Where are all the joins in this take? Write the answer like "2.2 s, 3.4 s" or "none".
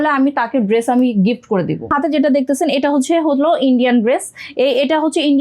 1.8 s